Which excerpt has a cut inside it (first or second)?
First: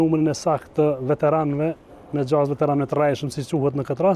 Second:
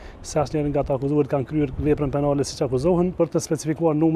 second